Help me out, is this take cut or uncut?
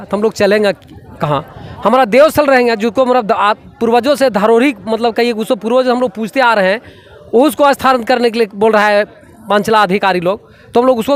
uncut